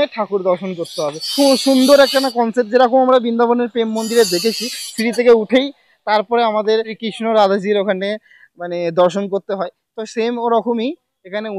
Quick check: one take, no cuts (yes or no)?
yes